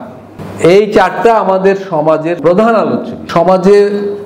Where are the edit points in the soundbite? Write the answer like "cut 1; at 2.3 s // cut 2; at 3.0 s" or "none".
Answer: cut 1; at 2.4 s // cut 2; at 3.3 s